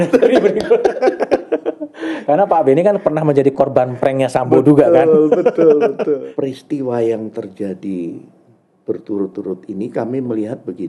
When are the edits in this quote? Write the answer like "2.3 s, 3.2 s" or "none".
6.2 s